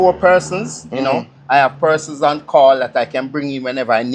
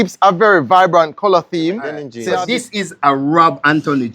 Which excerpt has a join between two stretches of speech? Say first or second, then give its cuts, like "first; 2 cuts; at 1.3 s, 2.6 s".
second; 1 cut; at 2.2 s